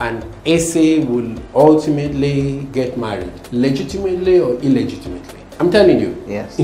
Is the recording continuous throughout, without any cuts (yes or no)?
yes